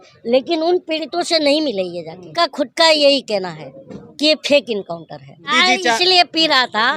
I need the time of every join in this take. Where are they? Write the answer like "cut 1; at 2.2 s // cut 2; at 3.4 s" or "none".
cut 1; at 2.3 s // cut 2; at 5.5 s